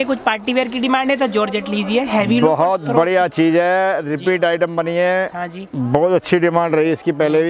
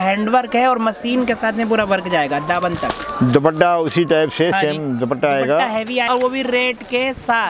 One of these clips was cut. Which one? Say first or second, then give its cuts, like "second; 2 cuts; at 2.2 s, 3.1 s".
second; 1 cut; at 6.1 s